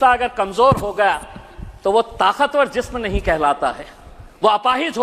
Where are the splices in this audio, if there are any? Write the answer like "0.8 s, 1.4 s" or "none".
none